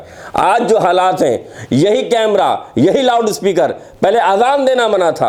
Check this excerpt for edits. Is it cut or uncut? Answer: uncut